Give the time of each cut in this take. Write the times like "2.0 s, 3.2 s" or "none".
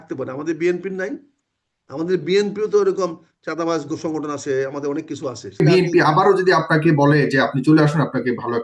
5.6 s